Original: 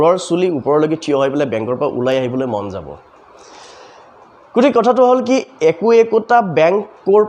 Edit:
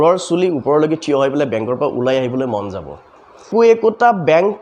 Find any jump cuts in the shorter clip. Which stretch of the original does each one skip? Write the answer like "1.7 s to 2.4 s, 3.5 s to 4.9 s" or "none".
3.5 s to 5.8 s